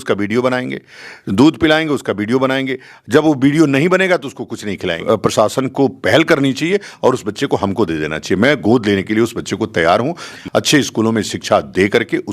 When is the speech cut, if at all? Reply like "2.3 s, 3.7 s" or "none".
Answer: 5.0 s, 10.3 s

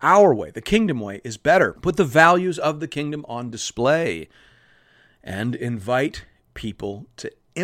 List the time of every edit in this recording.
1.8 s

